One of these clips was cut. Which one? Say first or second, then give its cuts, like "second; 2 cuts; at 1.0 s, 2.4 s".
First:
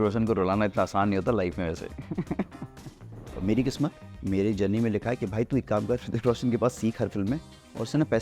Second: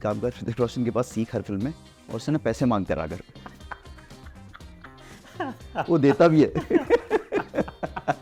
first; 1 cut; at 3.3 s